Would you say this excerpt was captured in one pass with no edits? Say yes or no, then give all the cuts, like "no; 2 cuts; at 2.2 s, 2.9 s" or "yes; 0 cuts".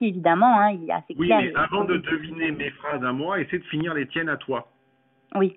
yes; 0 cuts